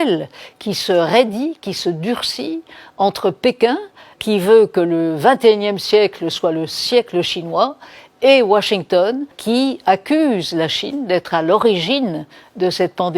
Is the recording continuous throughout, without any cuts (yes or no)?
no